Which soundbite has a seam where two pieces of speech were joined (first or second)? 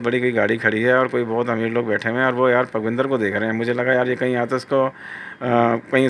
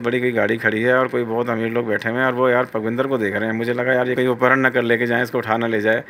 second